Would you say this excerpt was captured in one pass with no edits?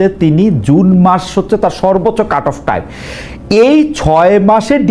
yes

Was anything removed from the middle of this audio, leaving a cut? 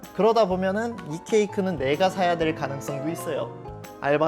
no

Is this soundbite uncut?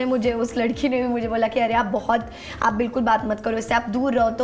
yes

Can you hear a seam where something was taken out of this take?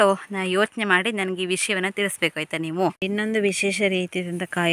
yes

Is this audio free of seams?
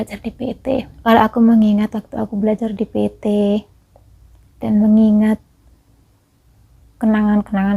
no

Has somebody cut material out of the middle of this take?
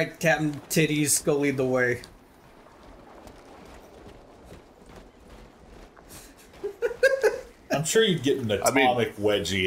no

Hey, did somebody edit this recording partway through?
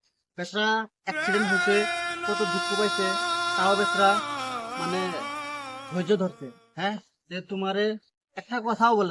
no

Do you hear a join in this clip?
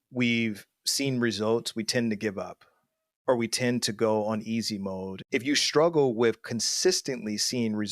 yes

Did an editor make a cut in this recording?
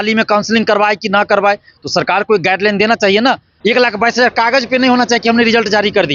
yes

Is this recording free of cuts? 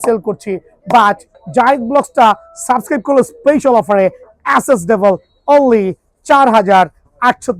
no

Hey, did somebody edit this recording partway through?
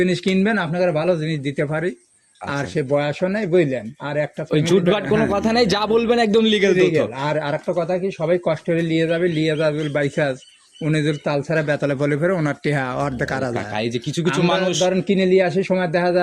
no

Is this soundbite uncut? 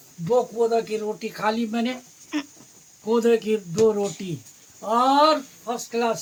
yes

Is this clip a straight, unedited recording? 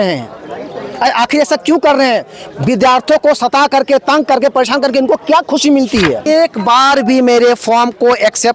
no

